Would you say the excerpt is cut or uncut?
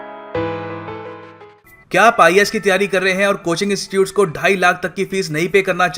cut